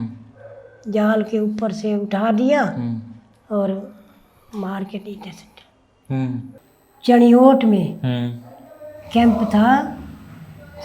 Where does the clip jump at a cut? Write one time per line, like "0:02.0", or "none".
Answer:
0:06.6